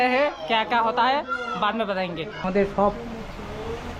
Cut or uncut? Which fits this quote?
cut